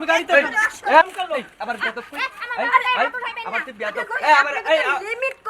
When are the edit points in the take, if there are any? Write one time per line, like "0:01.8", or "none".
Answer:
0:01.0